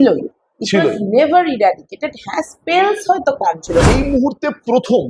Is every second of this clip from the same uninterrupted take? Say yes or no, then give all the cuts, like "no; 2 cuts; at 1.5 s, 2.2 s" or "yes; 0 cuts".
no; 1 cut; at 3.8 s